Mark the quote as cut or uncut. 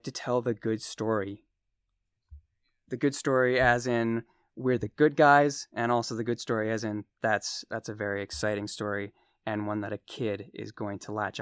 uncut